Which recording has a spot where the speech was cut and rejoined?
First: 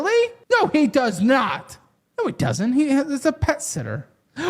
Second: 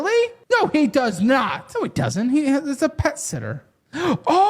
second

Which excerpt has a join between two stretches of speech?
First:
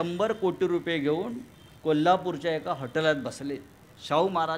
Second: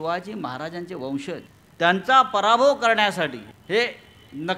second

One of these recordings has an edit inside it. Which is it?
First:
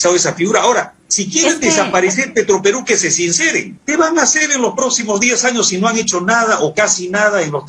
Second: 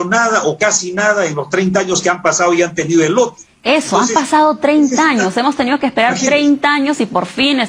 first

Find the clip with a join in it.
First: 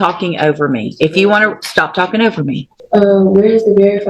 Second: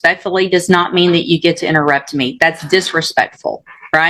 first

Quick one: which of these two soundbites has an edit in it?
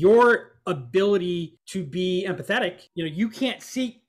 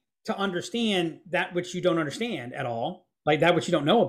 first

